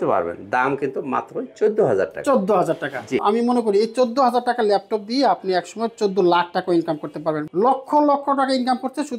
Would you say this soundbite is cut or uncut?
cut